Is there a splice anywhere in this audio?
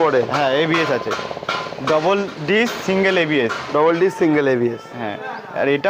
no; 0 cuts

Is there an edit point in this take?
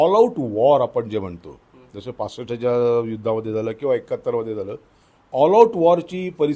no; 0 cuts

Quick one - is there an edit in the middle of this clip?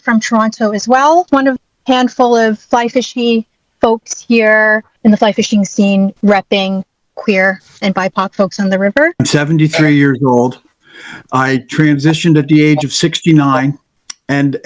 yes; 3 cuts; at 1.3 s, 6.2 s, 9.2 s

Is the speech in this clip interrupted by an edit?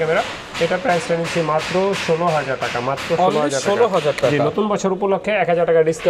no; 0 cuts

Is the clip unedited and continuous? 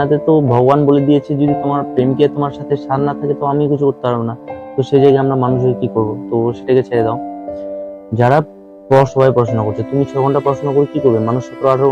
no; 1 cut; at 9.1 s

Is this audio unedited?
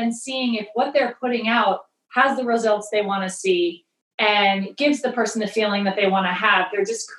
yes; 0 cuts

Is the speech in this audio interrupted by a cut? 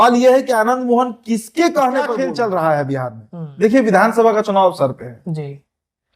yes; 1 cut; at 2.1 s

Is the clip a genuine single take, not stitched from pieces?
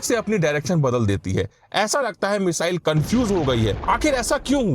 no; 1 cut; at 3.8 s

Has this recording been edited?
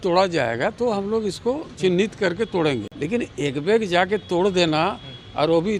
no; 0 cuts

